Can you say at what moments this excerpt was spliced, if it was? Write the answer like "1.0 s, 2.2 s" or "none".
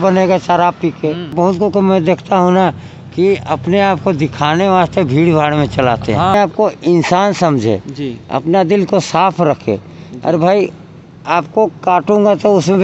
1.3 s, 6.3 s